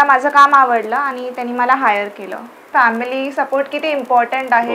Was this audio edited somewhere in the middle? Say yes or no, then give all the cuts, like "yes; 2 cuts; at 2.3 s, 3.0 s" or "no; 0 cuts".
yes; 1 cut; at 2.6 s